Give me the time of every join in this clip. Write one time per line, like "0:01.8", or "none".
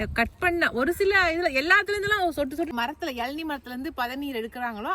0:02.7